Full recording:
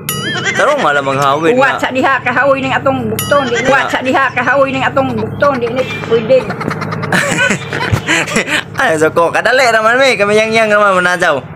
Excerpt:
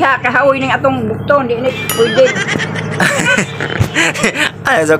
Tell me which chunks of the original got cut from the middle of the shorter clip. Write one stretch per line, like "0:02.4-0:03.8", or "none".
0:03.5-0:05.7